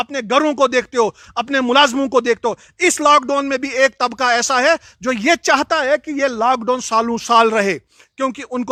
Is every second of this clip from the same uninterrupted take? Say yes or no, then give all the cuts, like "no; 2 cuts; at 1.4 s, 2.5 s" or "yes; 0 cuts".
yes; 0 cuts